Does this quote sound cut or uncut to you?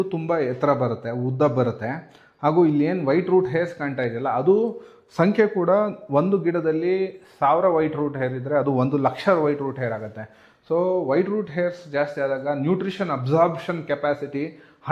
uncut